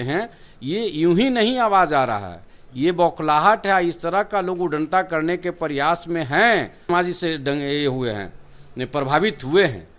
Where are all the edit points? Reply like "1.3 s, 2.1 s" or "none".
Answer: 6.9 s

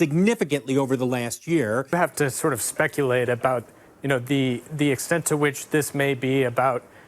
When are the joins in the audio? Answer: 1.9 s

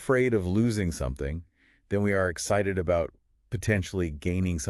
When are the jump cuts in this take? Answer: none

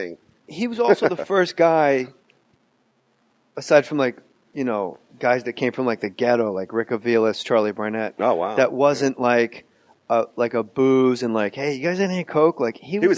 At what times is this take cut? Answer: 5.0 s

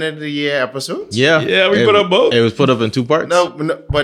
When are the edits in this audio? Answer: none

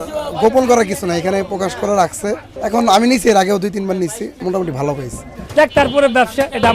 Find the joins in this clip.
2.5 s, 4.3 s, 5.3 s

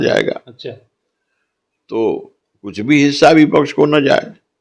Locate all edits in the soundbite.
none

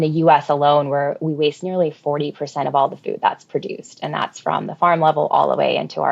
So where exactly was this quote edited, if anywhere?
none

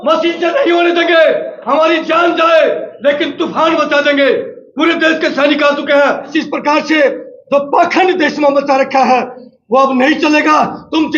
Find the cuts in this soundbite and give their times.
6.3 s

